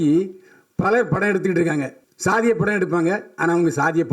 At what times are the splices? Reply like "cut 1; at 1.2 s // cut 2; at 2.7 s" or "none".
cut 1; at 2.0 s